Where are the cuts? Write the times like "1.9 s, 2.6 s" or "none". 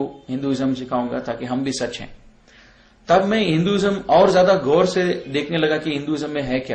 none